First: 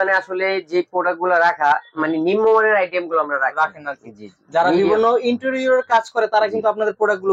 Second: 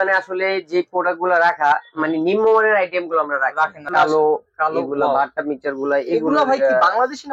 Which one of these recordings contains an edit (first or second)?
second